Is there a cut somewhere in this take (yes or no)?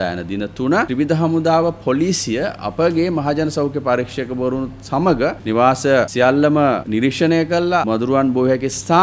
yes